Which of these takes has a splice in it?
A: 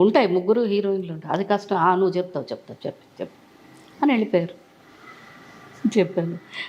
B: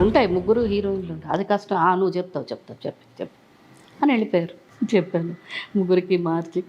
B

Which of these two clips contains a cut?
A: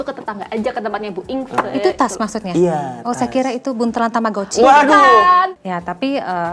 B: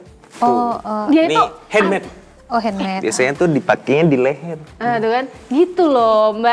A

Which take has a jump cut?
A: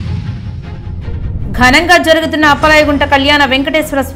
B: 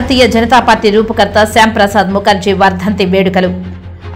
A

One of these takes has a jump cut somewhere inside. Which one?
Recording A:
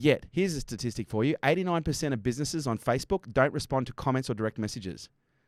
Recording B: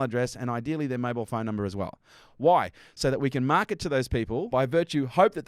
B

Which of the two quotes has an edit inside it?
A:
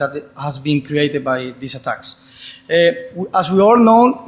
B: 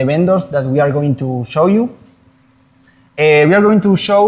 A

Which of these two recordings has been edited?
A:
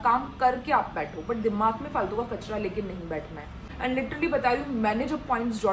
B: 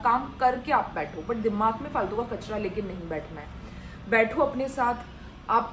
A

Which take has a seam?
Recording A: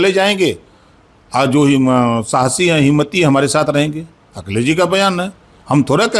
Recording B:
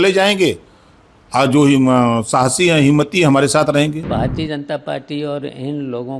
B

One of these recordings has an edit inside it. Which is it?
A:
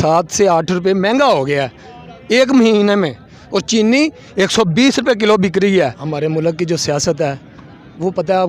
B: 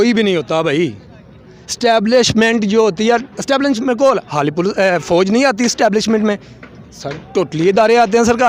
A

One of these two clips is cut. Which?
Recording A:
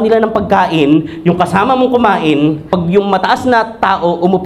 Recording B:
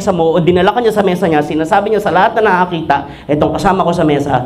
A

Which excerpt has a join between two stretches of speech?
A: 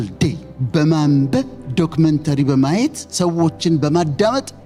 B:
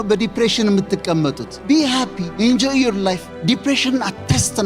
B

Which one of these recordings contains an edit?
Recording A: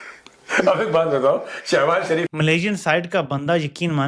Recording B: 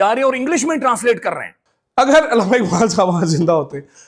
A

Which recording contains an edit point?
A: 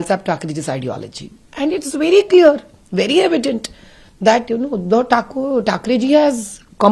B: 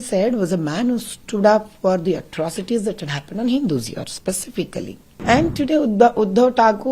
B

